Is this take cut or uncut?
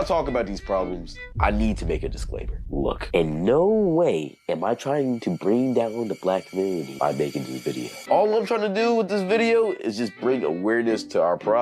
cut